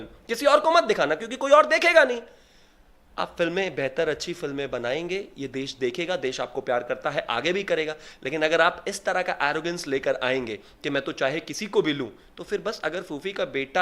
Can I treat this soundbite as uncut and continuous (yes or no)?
yes